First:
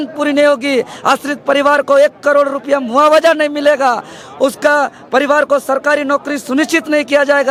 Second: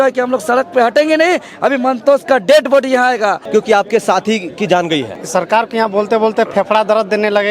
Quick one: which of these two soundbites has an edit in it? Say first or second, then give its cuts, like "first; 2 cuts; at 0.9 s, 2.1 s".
second; 2 cuts; at 3.4 s, 5.2 s